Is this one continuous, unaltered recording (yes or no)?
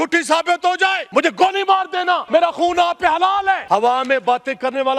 no